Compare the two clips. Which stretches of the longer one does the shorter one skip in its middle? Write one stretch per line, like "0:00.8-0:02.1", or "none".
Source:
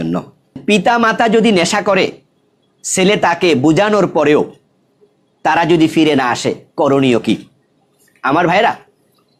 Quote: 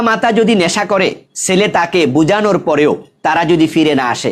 0:02.3-0:02.8
0:04.6-0:05.3